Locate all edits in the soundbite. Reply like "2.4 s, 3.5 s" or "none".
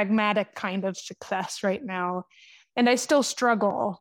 none

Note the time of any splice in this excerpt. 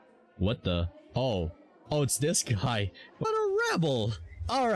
3.2 s

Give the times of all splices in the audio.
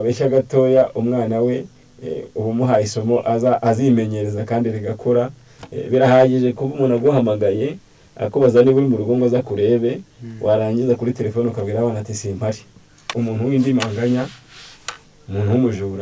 13.1 s

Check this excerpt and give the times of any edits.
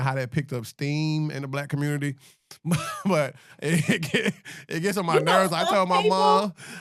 none

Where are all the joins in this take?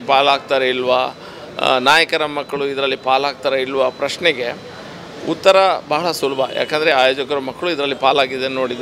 none

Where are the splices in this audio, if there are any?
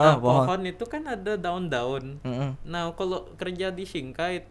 none

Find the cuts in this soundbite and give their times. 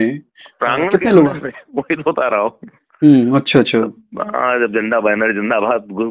none

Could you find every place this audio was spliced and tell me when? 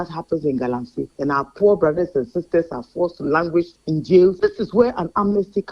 4.4 s

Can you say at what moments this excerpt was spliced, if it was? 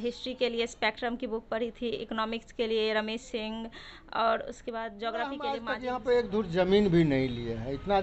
5.6 s

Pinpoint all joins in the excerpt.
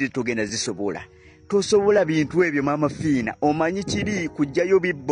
none

